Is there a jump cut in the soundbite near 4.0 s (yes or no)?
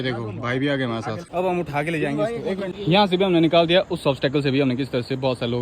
no